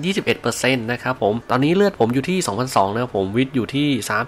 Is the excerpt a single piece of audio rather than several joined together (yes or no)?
no